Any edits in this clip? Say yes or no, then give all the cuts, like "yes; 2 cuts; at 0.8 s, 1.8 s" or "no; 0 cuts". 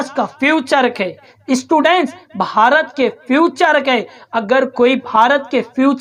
no; 0 cuts